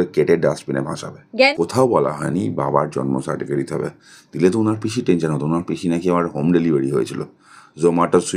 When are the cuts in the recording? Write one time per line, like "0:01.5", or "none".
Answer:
0:01.5